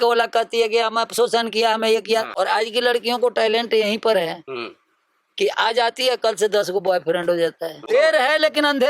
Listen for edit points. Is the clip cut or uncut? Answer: cut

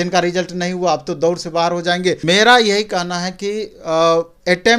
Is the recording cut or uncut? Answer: cut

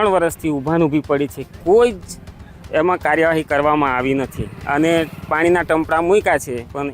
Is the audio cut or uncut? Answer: uncut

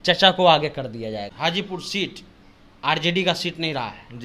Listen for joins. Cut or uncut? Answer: cut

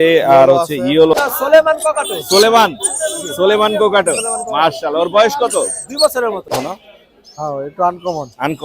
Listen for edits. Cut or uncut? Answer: cut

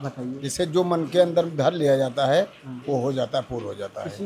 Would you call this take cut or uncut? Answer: uncut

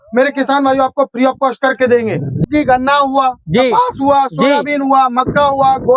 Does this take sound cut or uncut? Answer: cut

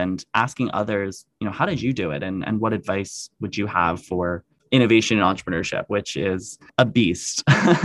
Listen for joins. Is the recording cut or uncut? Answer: cut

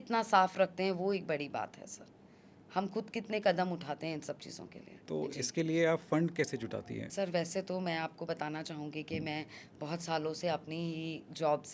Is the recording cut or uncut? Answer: cut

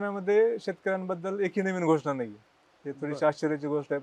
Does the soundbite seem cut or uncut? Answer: uncut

